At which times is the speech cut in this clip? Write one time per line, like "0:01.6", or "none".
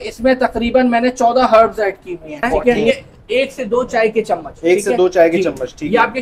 0:02.9